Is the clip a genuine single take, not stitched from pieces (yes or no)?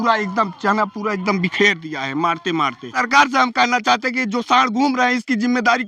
no